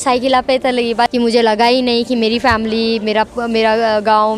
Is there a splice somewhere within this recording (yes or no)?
yes